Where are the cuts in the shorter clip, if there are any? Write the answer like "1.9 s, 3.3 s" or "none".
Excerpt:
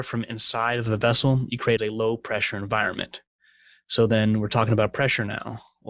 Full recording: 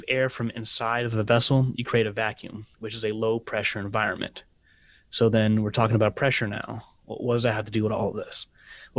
1.8 s